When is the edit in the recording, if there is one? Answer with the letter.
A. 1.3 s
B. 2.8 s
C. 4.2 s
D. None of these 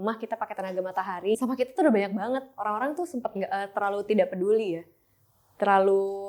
A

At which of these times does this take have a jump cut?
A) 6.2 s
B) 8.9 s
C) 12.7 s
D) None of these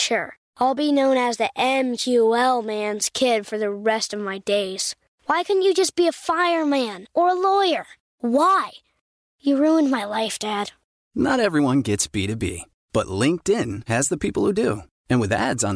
D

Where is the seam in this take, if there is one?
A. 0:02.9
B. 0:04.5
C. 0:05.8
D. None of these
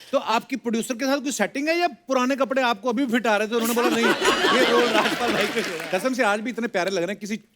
C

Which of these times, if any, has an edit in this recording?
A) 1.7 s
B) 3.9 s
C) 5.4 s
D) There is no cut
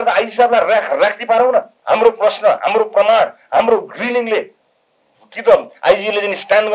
A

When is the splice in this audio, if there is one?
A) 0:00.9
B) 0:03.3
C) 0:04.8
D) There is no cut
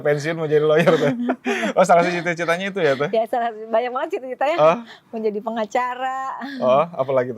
D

